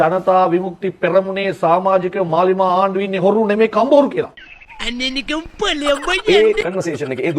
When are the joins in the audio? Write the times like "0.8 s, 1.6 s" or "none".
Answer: 6.2 s